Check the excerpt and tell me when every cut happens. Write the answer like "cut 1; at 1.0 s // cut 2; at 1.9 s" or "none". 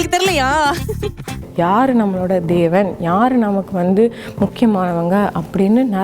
cut 1; at 1.4 s